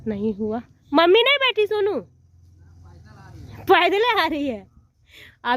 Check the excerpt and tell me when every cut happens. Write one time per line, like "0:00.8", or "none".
none